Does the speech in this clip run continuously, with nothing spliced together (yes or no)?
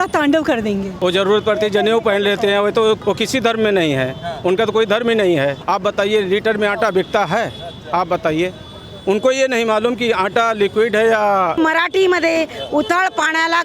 no